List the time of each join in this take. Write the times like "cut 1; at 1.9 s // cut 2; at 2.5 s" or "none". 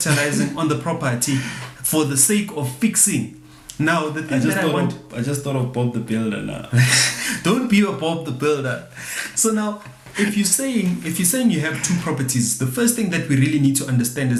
none